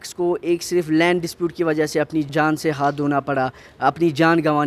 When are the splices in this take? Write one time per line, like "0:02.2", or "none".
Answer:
0:02.3